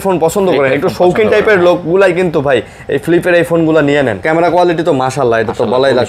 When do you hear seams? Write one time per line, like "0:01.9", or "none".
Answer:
0:04.2